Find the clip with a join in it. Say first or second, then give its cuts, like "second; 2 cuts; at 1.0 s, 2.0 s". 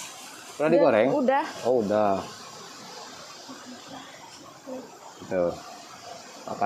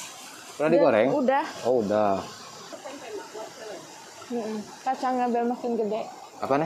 second; 1 cut; at 2.7 s